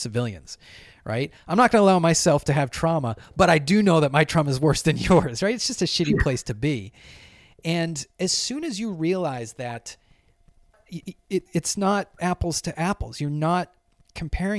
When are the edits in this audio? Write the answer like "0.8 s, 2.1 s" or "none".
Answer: 10.8 s